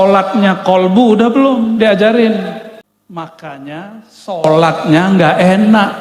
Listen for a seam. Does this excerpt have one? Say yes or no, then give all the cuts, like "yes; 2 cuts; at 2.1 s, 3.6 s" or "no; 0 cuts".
yes; 1 cut; at 2.9 s